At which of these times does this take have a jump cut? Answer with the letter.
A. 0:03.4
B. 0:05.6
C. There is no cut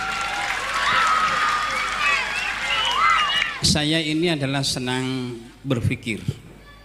A